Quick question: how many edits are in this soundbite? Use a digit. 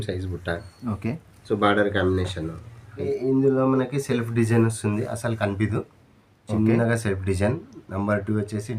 1